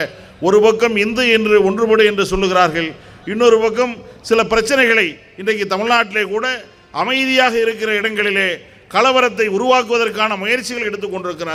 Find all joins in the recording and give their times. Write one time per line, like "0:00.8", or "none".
none